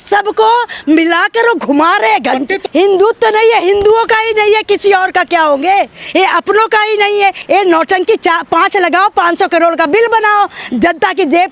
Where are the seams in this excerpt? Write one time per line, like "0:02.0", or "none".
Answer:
0:02.6
0:07.4